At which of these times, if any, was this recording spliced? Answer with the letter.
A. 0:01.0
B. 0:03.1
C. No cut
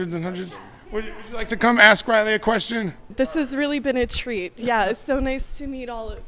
B